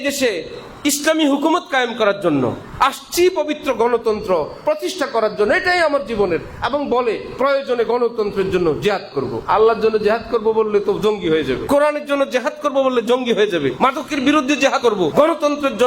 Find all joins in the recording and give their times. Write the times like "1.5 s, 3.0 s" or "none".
9.4 s, 11.6 s, 13.7 s, 14.9 s